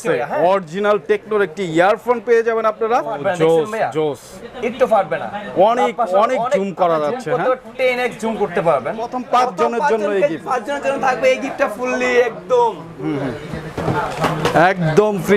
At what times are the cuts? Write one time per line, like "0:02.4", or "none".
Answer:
0:03.2
0:09.2